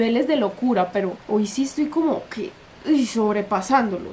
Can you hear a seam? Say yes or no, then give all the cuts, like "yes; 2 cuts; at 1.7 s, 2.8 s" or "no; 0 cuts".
no; 0 cuts